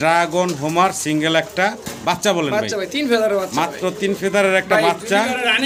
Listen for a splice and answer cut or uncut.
uncut